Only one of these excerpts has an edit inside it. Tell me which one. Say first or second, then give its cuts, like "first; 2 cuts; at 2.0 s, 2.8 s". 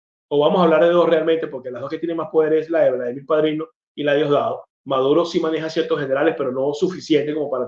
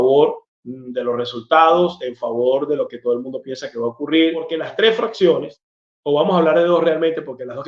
second; 1 cut; at 4.6 s